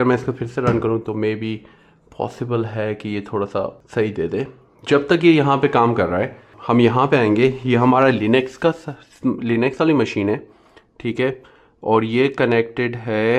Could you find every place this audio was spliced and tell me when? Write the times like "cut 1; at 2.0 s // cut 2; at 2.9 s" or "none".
cut 1; at 3.8 s // cut 2; at 6.5 s

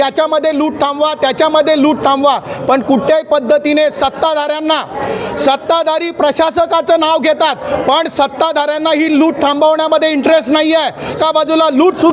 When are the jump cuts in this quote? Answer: cut 1; at 11.2 s

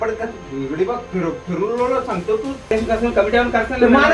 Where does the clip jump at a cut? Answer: cut 1; at 2.7 s

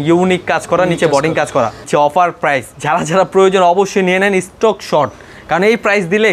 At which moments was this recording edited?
cut 1; at 1.8 s // cut 2; at 2.7 s

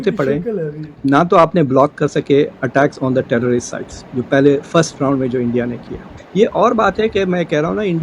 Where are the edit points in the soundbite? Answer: cut 1; at 5.7 s

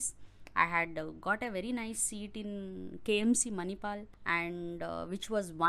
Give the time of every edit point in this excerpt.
cut 1; at 4.1 s

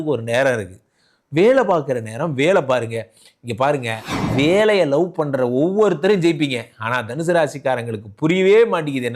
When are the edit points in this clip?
cut 1; at 4.1 s

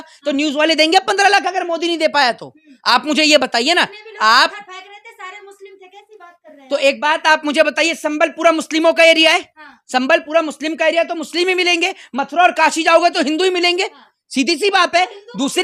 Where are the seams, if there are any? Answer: none

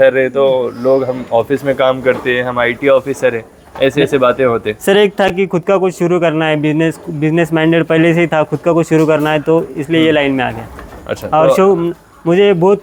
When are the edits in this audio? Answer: none

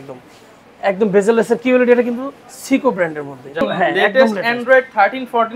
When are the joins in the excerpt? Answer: cut 1; at 3.6 s

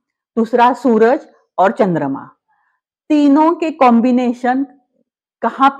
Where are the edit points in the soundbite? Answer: none

